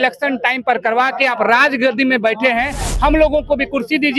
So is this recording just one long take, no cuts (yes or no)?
no